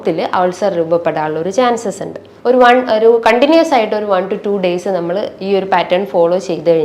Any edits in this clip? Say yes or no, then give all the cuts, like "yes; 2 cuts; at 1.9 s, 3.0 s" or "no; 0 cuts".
yes; 1 cut; at 2.3 s